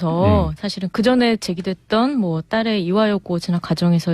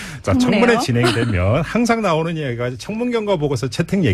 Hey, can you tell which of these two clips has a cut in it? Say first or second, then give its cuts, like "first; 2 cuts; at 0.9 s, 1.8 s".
first; 1 cut; at 1.6 s